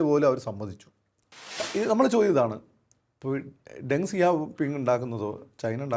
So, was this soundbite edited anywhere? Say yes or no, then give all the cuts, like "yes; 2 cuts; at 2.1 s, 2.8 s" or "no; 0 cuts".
yes; 1 cut; at 1.6 s